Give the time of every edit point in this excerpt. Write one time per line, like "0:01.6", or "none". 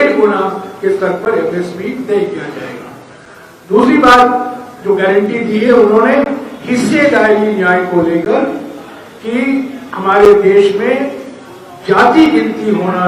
none